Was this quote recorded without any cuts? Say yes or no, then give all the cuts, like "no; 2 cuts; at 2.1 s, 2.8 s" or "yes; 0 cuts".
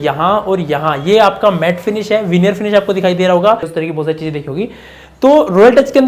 no; 1 cut; at 3.7 s